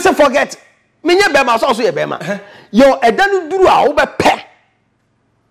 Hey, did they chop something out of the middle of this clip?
no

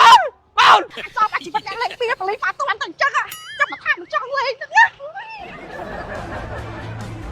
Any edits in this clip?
yes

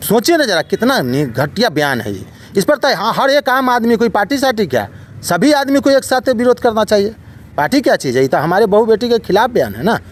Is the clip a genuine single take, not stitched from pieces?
yes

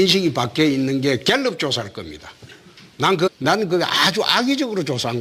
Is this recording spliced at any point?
no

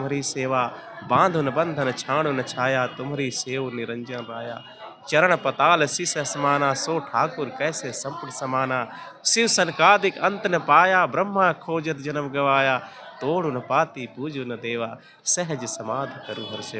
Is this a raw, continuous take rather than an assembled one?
yes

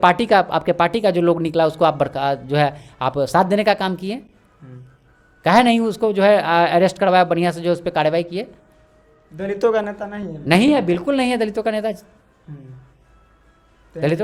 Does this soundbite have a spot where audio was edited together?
no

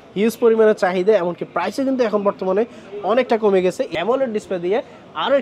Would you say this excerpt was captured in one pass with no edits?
no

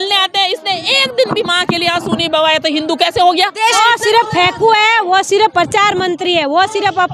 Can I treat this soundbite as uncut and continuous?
no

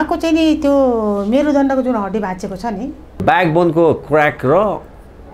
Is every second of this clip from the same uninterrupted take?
no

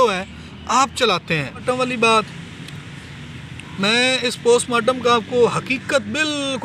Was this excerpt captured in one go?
no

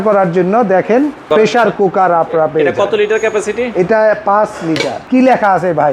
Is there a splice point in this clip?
yes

